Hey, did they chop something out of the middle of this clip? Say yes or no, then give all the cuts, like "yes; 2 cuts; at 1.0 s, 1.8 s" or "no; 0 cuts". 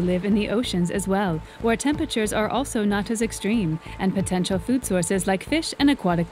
no; 0 cuts